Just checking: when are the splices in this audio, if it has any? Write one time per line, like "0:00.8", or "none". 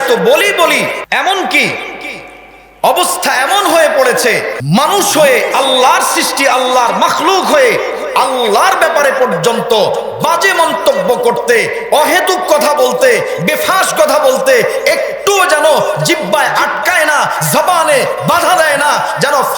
0:01.0
0:04.6